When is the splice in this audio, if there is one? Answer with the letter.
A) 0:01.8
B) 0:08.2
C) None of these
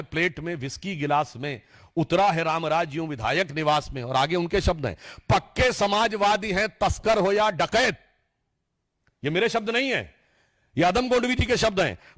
C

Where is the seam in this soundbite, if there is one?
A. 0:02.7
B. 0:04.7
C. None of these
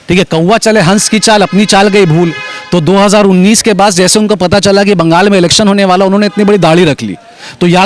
C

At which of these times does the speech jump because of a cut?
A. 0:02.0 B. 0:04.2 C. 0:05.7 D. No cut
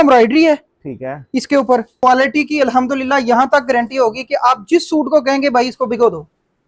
A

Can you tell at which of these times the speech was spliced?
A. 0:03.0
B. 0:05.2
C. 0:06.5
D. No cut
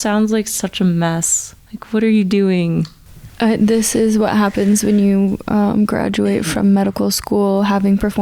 D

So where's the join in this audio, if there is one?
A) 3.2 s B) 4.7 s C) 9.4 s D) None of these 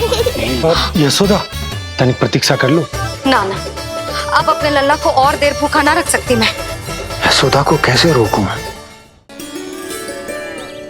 C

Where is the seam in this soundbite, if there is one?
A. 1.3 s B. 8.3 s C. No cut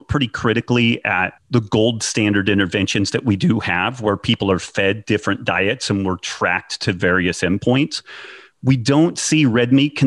A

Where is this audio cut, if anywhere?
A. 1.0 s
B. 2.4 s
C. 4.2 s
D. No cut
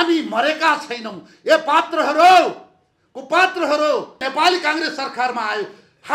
C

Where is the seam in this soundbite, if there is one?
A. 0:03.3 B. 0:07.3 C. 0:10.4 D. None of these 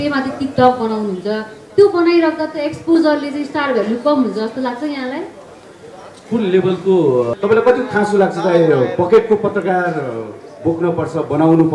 B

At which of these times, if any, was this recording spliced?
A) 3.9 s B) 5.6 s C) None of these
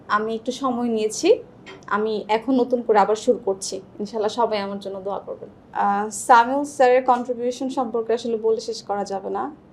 B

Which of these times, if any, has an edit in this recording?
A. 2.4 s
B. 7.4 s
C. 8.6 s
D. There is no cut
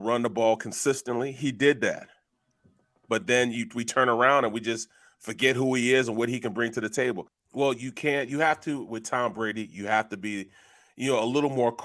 B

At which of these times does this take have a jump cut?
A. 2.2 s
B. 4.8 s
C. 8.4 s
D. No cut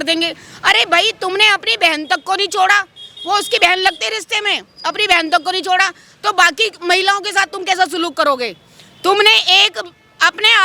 D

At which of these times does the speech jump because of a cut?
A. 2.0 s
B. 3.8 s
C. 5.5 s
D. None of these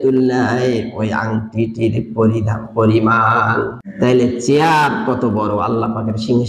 B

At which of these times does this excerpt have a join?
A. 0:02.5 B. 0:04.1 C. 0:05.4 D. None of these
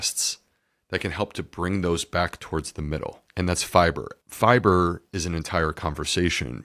B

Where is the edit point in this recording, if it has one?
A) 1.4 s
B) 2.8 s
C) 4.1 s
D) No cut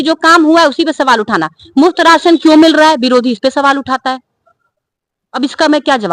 D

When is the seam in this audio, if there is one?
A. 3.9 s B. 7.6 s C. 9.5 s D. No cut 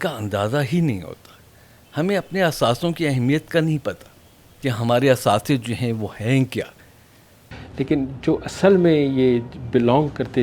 B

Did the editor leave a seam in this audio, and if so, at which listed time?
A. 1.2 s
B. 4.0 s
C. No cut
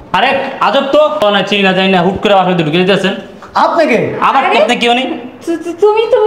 A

